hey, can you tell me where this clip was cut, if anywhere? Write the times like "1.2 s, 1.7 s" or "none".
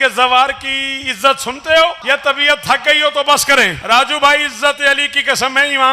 2.0 s, 3.8 s